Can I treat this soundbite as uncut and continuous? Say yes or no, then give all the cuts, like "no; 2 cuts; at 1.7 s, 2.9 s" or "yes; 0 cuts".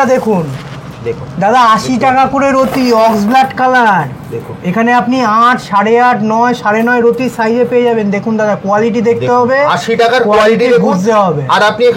yes; 0 cuts